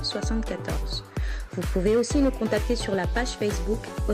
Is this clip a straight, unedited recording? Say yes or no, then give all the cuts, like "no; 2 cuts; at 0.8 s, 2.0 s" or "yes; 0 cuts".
yes; 0 cuts